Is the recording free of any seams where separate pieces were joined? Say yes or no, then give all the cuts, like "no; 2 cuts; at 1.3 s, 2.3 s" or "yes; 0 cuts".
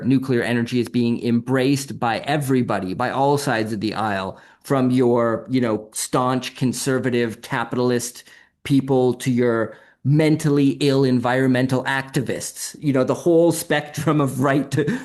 yes; 0 cuts